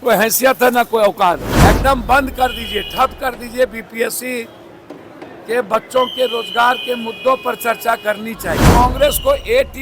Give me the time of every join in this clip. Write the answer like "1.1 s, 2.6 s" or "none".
1.5 s, 8.7 s